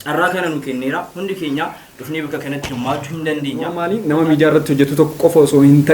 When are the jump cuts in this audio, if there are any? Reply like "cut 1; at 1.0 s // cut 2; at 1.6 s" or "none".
cut 1; at 3.9 s